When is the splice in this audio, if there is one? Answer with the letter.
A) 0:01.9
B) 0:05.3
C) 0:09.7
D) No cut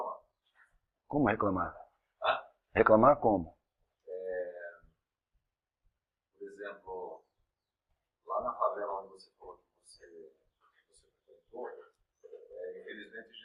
D